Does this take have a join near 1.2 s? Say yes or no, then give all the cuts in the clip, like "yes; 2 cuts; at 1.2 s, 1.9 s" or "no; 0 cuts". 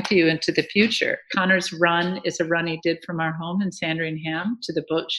yes; 1 cut; at 1.2 s